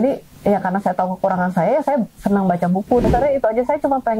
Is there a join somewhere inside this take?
yes; 1 cut; at 3.1 s

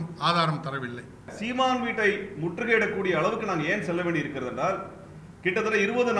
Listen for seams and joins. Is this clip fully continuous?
no; 1 cut; at 1.3 s

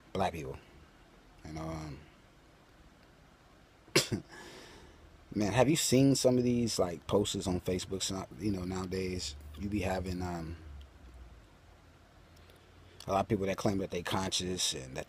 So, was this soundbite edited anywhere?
no; 0 cuts

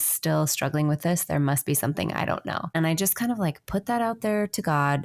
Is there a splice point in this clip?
yes; 1 cut; at 2.7 s

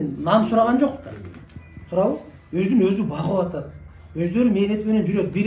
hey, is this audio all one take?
yes; 0 cuts

